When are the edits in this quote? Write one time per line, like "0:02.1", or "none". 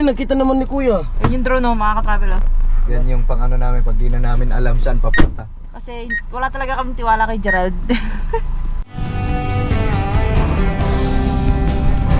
none